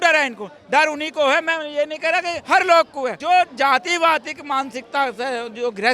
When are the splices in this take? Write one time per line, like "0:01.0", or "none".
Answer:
0:02.4
0:03.1